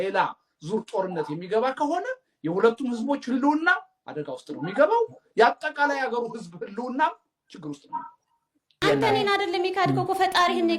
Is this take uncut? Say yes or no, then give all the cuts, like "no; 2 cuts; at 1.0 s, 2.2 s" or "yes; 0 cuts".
no; 1 cut; at 8.7 s